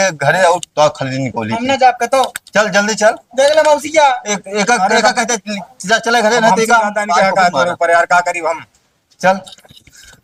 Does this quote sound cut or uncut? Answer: uncut